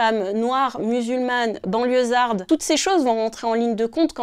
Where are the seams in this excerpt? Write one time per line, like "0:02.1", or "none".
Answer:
0:02.4